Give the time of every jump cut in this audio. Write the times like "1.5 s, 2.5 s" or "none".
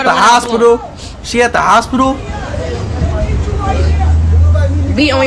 none